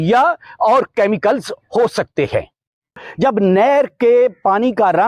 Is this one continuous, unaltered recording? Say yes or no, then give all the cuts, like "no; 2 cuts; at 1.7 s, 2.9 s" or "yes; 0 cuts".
no; 1 cut; at 3.0 s